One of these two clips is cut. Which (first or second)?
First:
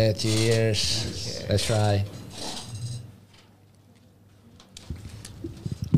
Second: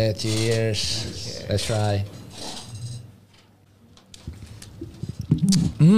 second